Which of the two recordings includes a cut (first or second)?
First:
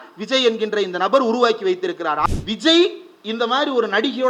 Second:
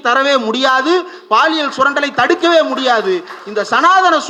first